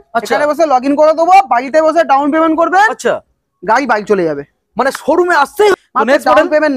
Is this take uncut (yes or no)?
no